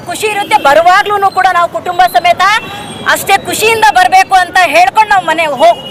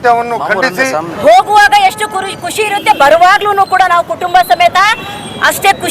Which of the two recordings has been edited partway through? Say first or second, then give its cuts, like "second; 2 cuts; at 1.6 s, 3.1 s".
second; 1 cut; at 1.1 s